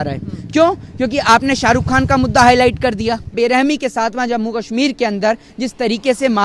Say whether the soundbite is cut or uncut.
cut